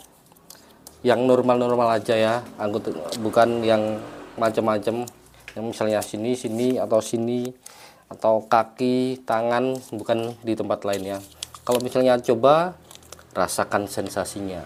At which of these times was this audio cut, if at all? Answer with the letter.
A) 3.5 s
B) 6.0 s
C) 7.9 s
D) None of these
D